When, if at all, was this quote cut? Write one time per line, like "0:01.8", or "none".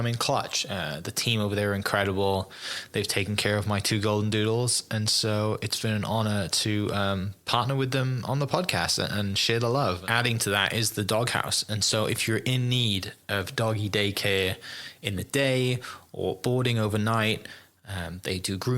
0:10.0

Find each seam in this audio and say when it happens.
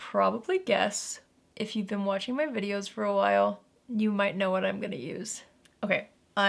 none

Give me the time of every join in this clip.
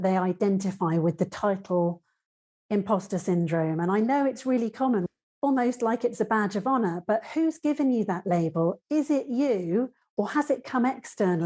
0:05.1

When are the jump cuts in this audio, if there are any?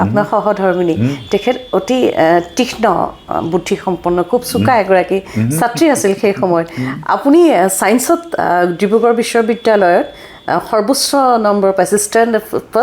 none

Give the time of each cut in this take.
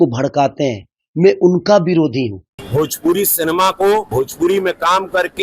0:02.5

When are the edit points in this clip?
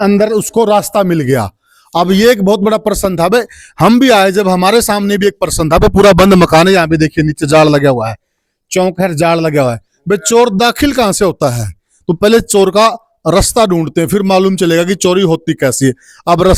none

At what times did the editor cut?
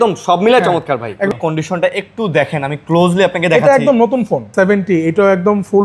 0:01.3
0:04.5

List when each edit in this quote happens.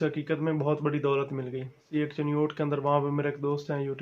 0:01.9

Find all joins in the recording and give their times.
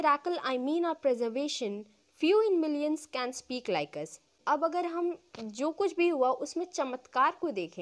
0:04.4

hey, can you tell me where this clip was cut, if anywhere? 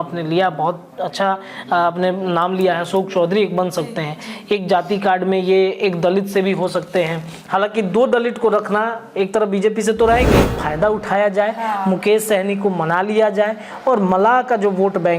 0:10.6

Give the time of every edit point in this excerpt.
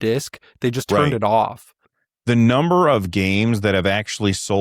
0:02.0

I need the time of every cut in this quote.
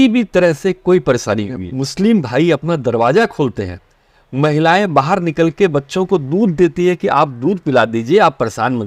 0:01.6

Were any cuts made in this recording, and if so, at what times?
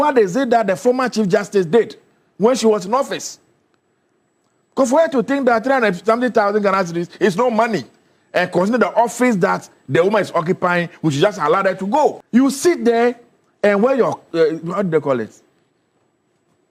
none

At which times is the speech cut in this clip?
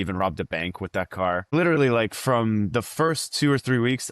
0:01.5

